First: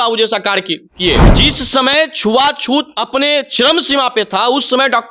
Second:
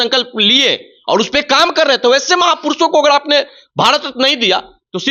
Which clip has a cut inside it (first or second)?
first